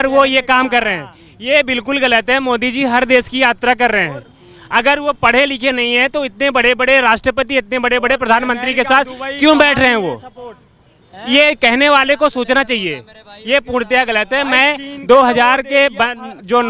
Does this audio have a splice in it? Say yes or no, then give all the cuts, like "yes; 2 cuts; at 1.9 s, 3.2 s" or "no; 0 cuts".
no; 0 cuts